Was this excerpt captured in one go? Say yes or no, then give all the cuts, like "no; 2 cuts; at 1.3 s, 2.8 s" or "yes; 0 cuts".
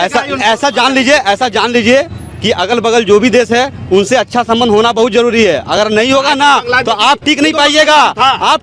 yes; 0 cuts